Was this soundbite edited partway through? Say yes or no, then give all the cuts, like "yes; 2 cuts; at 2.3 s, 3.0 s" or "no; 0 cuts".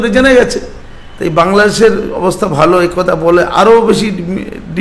no; 0 cuts